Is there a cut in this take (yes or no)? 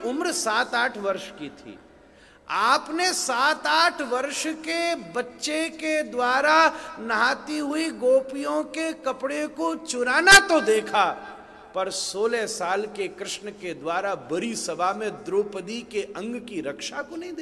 no